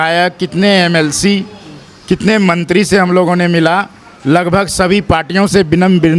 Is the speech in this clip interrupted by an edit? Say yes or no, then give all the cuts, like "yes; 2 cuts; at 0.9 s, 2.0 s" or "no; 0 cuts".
no; 0 cuts